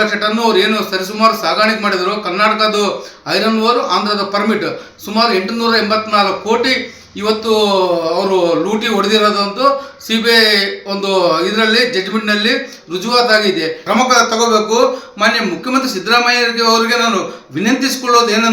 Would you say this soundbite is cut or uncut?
cut